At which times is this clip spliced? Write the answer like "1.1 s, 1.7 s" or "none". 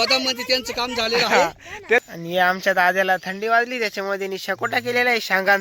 2.1 s